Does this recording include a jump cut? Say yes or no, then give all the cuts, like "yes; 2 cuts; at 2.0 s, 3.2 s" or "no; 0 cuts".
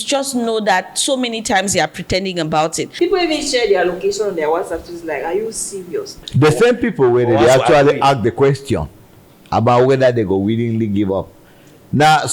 yes; 2 cuts; at 2.9 s, 6.2 s